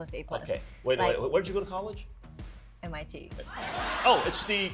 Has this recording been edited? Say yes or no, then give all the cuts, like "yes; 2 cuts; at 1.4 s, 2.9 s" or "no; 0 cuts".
yes; 1 cut; at 3.7 s